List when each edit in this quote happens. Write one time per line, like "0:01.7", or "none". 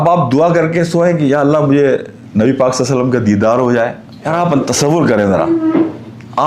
0:04.1